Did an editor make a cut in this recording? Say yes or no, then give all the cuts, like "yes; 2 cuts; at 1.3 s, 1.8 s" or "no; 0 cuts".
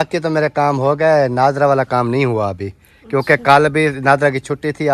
no; 0 cuts